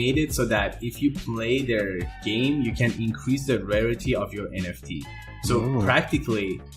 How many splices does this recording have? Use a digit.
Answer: 0